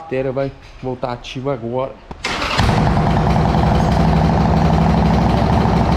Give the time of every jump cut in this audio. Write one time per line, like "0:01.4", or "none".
0:02.1